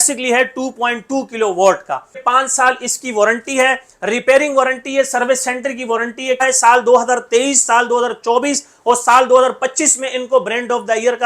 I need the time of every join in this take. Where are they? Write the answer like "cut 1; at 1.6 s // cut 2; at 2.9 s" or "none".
cut 1; at 2.2 s // cut 2; at 6.4 s